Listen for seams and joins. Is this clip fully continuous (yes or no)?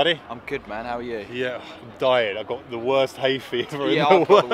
yes